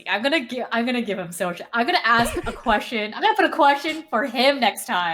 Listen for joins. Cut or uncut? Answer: uncut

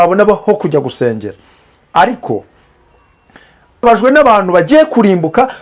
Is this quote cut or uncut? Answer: cut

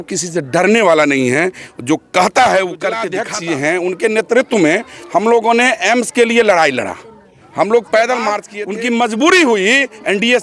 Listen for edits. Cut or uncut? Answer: cut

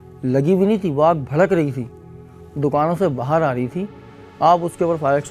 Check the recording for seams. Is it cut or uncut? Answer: uncut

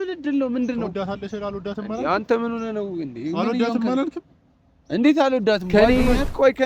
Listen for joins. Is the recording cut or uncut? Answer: cut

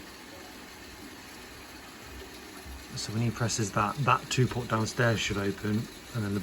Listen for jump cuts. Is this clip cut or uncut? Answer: uncut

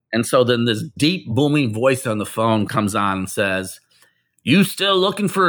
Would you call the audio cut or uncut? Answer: cut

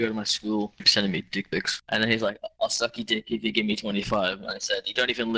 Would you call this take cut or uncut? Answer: cut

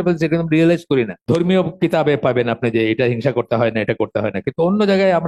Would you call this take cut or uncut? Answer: cut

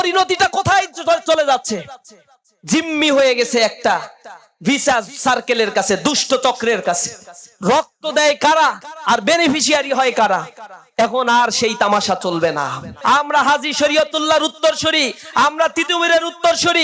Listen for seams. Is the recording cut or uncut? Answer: cut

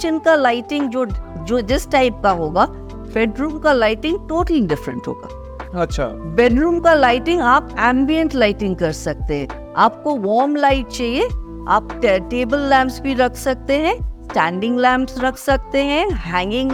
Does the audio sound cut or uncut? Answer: uncut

